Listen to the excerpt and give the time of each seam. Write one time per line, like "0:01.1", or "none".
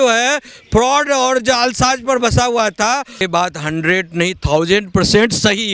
0:03.2